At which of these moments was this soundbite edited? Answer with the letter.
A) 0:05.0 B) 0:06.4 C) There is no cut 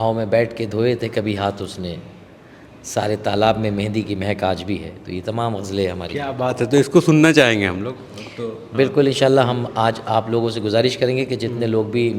C